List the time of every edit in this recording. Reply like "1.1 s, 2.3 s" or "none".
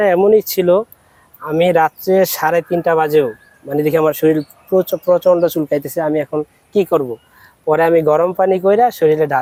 none